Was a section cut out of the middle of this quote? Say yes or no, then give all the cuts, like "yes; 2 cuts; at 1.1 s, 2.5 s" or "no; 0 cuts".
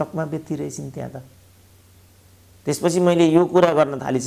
no; 0 cuts